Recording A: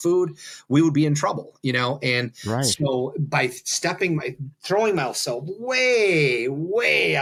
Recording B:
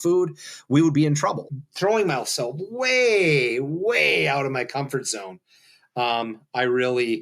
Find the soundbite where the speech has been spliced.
B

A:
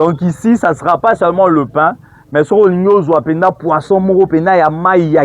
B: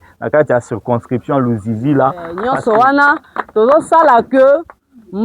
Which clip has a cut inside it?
B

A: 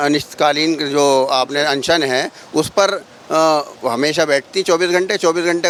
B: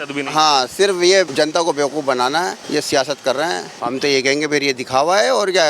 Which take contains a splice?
B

